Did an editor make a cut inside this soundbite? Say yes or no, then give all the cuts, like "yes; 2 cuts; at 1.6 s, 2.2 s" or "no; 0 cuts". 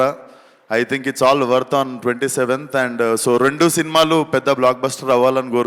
no; 0 cuts